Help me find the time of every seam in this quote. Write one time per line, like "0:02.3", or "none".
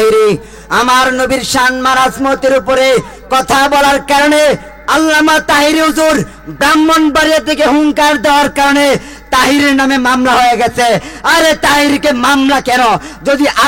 none